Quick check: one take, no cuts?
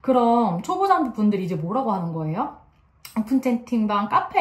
yes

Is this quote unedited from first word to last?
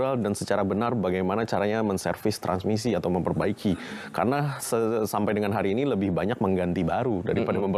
yes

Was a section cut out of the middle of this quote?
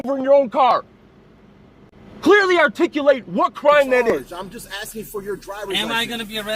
yes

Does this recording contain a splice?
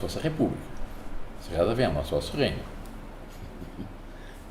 no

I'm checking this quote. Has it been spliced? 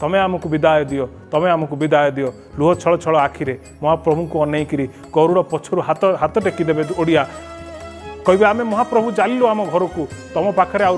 no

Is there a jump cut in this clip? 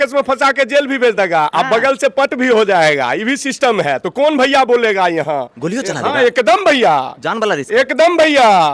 no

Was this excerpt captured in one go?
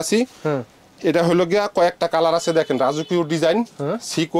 yes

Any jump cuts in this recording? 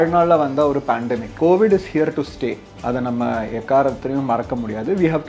yes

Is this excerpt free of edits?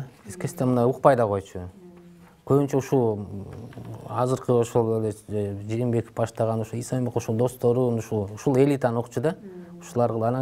yes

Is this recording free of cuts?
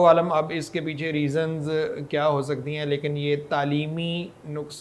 yes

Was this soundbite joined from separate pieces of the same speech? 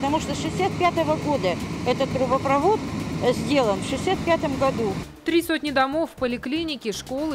yes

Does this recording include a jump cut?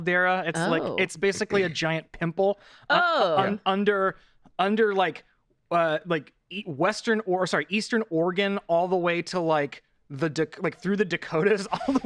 no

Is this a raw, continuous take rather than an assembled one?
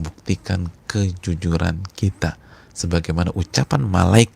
yes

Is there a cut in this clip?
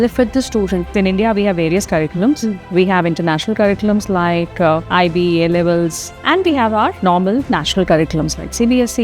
yes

